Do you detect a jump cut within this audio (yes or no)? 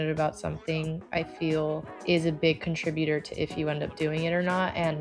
no